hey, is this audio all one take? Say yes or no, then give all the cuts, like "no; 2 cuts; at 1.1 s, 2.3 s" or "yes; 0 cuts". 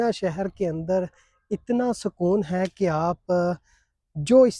yes; 0 cuts